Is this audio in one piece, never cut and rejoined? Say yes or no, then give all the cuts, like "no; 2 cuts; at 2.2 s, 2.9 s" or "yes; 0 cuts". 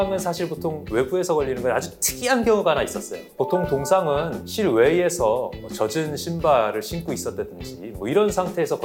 yes; 0 cuts